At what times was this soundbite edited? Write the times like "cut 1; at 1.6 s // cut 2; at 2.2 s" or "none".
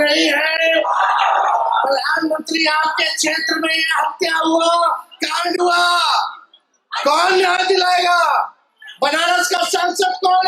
none